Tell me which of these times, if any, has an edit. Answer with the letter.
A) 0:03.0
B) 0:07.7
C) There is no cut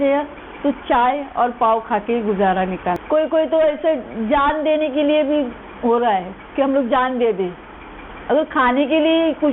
A